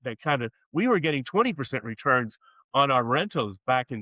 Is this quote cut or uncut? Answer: uncut